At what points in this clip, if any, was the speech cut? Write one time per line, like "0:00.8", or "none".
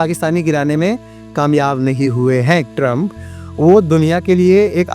0:02.7